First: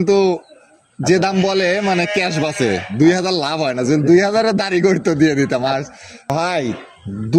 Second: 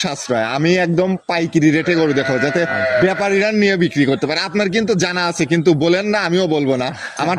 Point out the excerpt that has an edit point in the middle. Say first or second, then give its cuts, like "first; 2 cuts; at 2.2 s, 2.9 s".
first; 1 cut; at 6.3 s